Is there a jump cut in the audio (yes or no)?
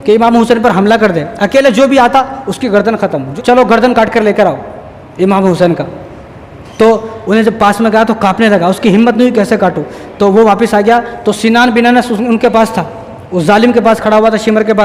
yes